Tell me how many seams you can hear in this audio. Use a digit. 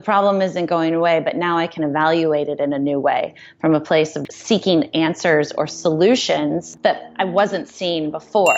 2